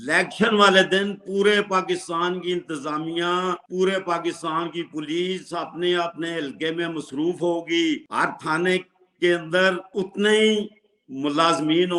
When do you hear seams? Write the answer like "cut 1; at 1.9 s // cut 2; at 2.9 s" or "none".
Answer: none